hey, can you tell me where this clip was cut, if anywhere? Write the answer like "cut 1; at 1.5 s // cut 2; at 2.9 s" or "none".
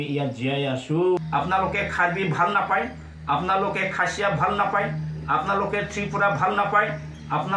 cut 1; at 1.2 s